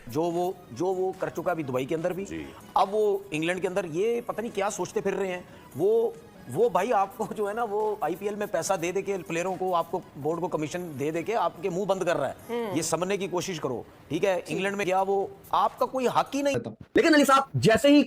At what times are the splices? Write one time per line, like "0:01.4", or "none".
0:16.7

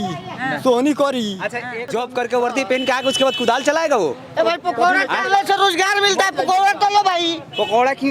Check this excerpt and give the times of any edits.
0:01.8

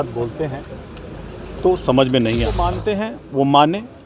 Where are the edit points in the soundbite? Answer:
0:02.8

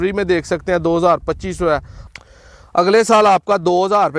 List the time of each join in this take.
0:01.9

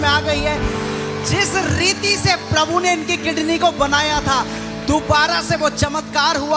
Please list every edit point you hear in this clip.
none

